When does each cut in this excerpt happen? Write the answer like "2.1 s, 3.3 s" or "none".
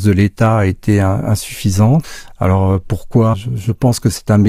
2.2 s, 3.3 s